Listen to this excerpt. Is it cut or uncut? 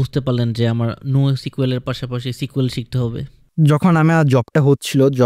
uncut